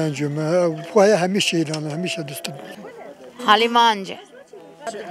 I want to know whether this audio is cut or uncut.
cut